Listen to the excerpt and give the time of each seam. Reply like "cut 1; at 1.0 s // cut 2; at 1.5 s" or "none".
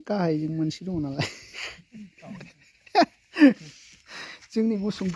cut 1; at 3.6 s